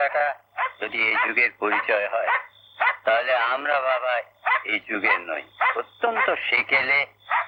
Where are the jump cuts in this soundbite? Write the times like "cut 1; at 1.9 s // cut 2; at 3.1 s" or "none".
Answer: none